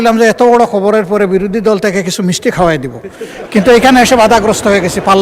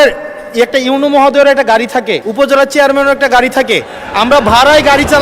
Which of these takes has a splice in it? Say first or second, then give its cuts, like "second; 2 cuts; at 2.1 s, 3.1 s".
second; 1 cut; at 2.2 s